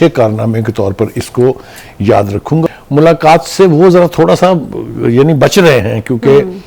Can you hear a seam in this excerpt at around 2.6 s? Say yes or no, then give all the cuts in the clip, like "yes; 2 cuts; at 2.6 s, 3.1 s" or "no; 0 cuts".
yes; 1 cut; at 2.6 s